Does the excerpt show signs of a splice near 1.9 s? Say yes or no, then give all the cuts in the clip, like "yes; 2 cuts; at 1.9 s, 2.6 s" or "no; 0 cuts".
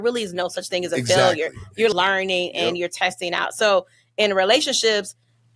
yes; 1 cut; at 1.9 s